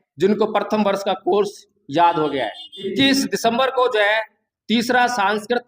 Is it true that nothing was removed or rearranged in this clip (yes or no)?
no